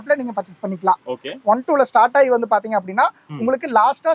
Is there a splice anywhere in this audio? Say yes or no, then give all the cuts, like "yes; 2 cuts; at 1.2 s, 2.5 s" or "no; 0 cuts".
no; 0 cuts